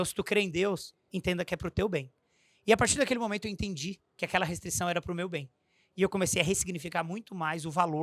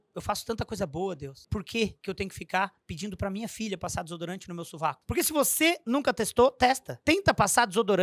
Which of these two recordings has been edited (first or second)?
second